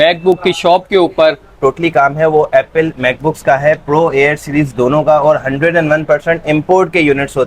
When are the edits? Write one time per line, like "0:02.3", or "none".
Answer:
0:01.5